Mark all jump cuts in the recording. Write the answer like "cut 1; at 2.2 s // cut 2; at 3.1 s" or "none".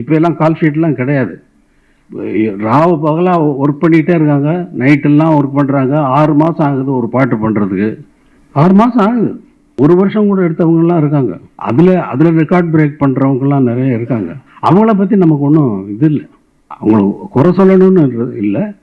none